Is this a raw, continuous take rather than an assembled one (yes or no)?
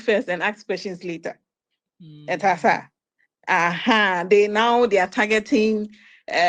yes